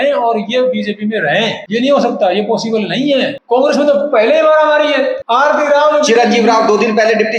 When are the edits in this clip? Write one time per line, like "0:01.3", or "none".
0:01.6
0:03.4
0:05.2